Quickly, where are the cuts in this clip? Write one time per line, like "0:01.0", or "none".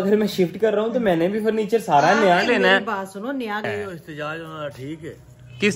0:03.6